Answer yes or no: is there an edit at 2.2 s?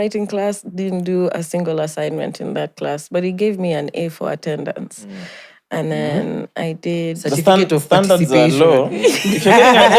no